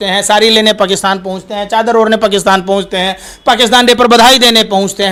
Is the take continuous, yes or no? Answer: yes